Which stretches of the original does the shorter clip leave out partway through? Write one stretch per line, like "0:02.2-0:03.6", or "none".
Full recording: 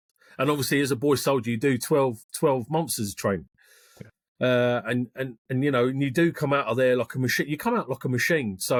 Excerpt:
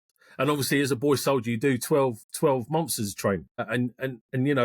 0:03.7-0:04.8